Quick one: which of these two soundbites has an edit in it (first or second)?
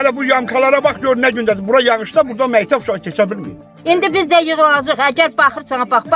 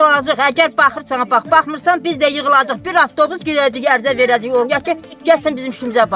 first